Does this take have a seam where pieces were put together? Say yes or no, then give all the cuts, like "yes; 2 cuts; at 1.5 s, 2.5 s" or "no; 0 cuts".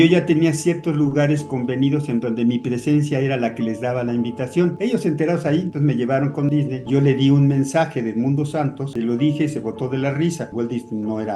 yes; 2 cuts; at 4.7 s, 8.9 s